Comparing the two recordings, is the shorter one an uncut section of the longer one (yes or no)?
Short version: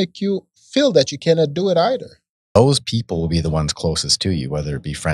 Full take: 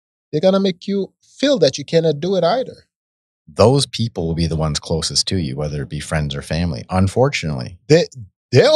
no